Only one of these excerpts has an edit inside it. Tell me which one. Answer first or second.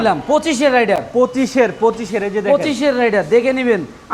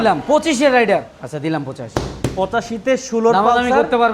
second